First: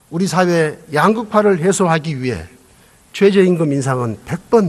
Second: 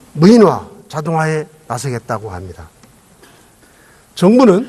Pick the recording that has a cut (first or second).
second